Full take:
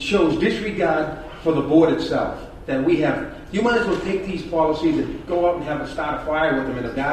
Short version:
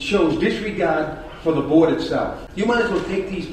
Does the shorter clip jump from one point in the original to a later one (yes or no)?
yes